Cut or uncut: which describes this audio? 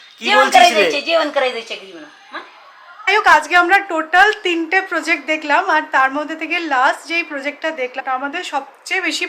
cut